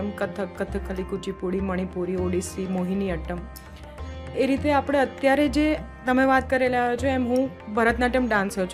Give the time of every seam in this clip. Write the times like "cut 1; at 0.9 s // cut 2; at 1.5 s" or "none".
none